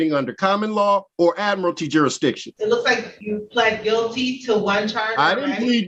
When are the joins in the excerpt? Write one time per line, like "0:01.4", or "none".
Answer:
0:01.1
0:02.5
0:03.1